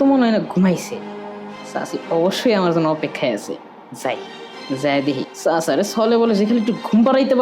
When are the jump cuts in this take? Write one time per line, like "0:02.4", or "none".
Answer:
0:05.3